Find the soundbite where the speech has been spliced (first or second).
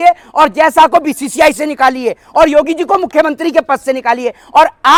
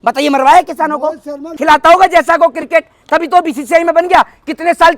second